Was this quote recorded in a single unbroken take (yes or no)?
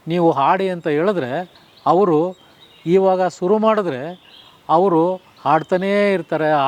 yes